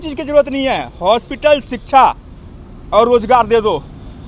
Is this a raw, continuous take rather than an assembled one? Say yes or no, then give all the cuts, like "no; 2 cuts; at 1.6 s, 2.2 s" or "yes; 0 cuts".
yes; 0 cuts